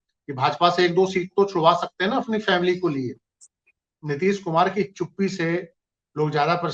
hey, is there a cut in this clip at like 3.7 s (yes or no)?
yes